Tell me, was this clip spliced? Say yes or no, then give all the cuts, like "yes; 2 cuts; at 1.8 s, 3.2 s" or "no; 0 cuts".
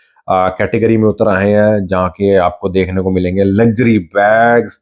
no; 0 cuts